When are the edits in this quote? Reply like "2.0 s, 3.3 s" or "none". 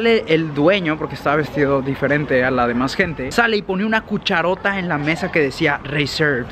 none